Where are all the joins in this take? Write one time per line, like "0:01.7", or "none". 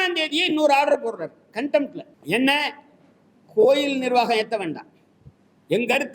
0:02.1